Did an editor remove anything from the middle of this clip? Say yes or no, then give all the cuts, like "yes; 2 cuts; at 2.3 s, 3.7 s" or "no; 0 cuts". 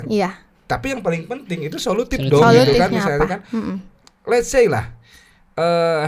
no; 0 cuts